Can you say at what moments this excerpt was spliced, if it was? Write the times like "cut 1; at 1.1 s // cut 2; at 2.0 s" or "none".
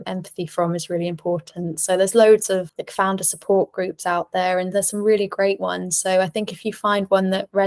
cut 1; at 2.8 s